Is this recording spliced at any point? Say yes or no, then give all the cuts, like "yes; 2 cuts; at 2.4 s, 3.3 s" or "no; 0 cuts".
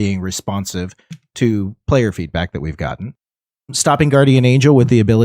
no; 0 cuts